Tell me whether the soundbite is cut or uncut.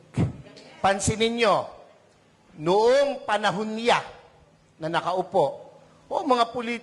cut